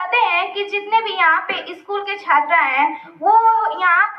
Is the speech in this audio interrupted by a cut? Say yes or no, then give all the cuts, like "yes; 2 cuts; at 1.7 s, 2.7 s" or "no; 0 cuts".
yes; 1 cut; at 3.1 s